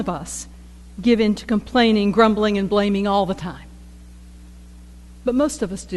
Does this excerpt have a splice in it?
no; 0 cuts

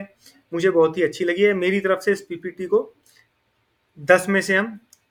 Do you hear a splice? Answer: no; 0 cuts

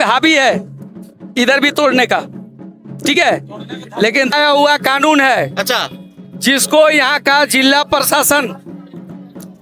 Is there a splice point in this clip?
yes; 1 cut; at 4.3 s

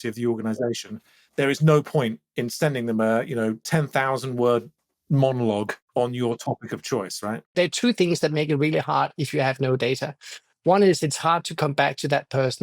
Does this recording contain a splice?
yes; 2 cuts; at 5.8 s, 7.5 s

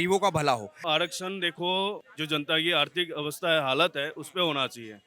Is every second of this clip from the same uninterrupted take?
no; 2 cuts; at 0.8 s, 2.1 s

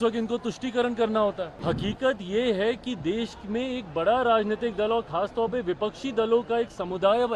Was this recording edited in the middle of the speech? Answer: yes; 1 cut; at 1.5 s

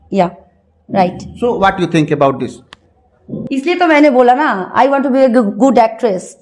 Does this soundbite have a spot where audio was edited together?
no; 0 cuts

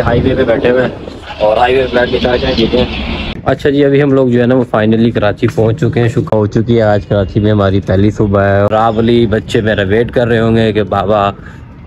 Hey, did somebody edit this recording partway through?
yes; 3 cuts; at 3.3 s, 6.3 s, 8.7 s

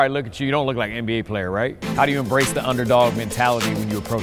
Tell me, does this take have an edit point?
no; 0 cuts

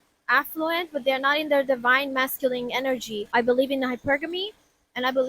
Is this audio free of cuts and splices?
no; 1 cut; at 3.3 s

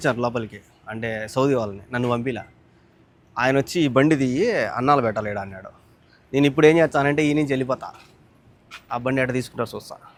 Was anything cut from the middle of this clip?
no; 0 cuts

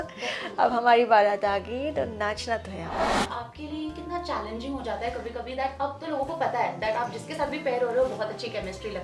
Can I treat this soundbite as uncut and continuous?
no; 1 cut; at 2.9 s

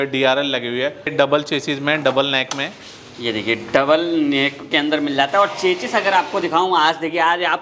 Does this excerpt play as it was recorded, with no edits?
no; 1 cut; at 1.1 s

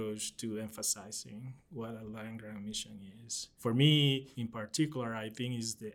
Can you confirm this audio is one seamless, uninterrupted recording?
no; 2 cuts; at 3.5 s, 4.4 s

